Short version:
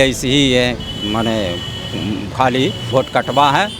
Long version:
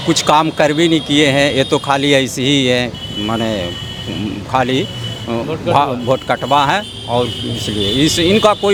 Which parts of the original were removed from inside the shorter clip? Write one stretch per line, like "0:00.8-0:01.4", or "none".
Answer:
0:05.0-0:06.0